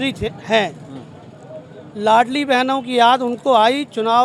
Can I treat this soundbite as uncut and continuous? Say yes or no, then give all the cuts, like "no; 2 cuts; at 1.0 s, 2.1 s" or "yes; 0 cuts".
yes; 0 cuts